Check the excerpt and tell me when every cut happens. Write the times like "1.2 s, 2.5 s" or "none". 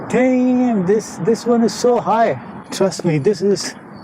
2.6 s